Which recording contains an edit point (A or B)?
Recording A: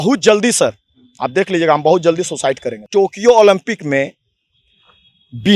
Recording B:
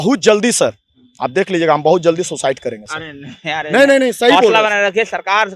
A